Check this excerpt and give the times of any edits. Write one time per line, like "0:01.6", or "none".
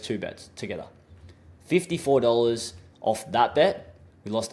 none